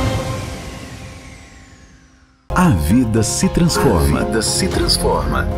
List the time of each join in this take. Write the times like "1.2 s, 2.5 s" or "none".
2.0 s